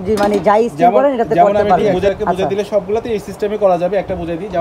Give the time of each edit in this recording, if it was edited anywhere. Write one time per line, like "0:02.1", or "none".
0:01.9